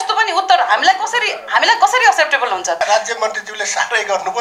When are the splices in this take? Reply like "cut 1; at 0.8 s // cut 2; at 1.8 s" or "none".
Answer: cut 1; at 2.8 s